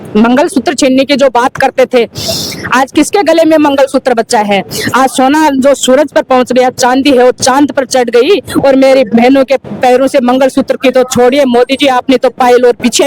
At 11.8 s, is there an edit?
no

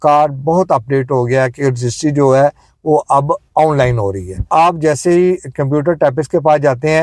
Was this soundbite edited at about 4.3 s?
no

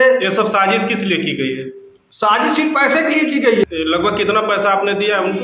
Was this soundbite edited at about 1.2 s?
no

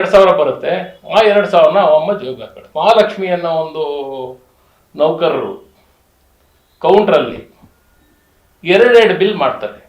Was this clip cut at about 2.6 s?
yes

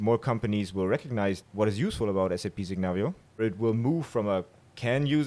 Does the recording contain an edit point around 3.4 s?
yes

